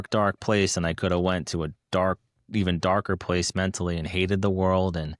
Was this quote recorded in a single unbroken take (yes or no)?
yes